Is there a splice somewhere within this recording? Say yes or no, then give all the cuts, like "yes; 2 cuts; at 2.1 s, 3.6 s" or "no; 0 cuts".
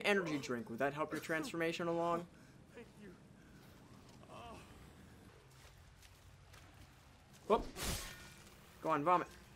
yes; 2 cuts; at 2.4 s, 5.2 s